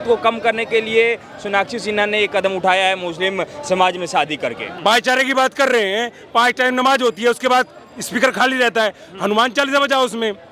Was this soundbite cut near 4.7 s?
yes; 1 cut; at 4.7 s

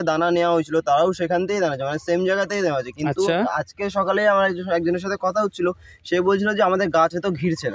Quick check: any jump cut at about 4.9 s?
no; 0 cuts

